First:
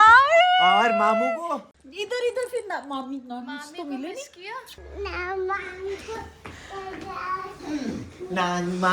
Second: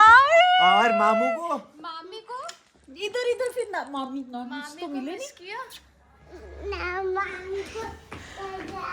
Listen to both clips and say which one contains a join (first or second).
first